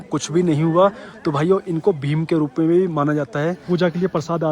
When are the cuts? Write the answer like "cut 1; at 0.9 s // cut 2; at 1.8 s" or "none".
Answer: cut 1; at 3.6 s